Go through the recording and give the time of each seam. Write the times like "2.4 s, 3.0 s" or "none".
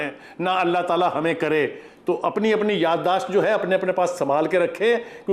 none